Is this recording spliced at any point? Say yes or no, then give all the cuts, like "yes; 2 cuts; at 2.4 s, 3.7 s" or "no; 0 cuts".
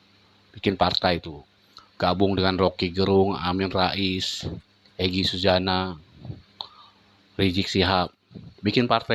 no; 0 cuts